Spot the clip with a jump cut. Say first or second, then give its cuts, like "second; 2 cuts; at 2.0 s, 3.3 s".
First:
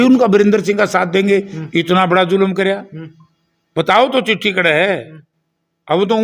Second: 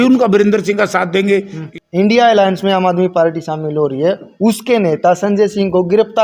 second; 1 cut; at 1.7 s